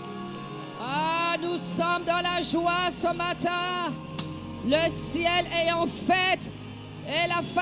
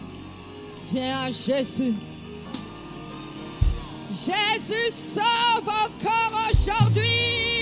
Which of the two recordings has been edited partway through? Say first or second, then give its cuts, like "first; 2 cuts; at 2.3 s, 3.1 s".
second; 1 cut; at 2.5 s